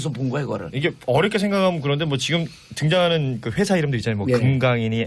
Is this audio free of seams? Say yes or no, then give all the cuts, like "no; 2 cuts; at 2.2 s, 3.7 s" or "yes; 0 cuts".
no; 1 cut; at 1.3 s